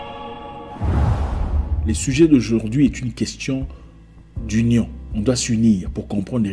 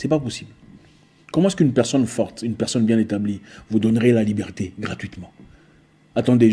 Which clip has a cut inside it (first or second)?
first